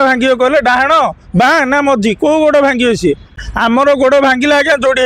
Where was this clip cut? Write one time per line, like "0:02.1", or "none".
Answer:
0:03.5